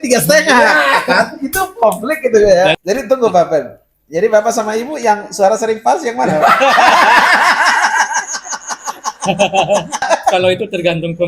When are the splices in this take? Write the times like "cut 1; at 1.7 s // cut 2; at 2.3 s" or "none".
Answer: cut 1; at 2.8 s // cut 2; at 10.0 s